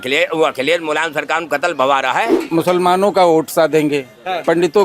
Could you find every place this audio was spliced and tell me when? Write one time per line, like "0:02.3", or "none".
0:02.4